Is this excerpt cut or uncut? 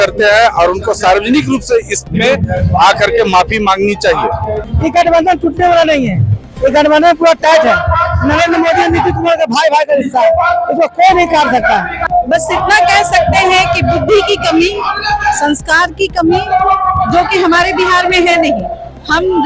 cut